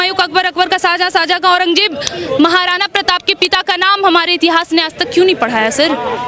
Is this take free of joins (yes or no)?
yes